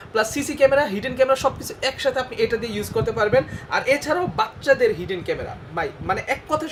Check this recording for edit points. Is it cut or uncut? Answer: uncut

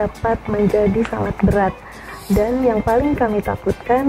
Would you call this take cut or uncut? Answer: uncut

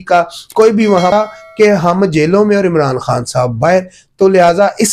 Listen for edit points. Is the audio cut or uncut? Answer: cut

